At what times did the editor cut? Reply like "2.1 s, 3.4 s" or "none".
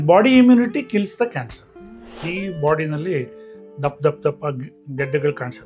2.2 s